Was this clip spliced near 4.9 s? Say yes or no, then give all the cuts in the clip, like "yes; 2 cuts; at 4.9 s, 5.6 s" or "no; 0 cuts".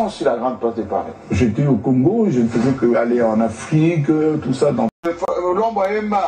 yes; 1 cut; at 4.9 s